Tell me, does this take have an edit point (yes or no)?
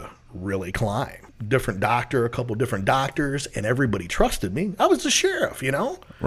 yes